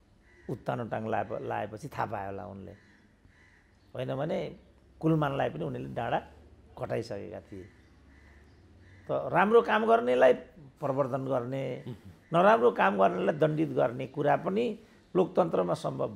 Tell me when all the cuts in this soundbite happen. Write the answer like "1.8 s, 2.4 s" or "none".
none